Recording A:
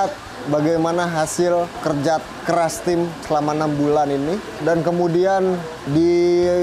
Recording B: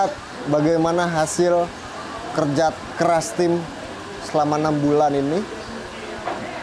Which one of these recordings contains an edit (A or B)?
A